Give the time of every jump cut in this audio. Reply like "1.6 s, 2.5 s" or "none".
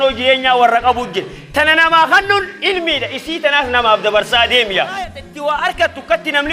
5.2 s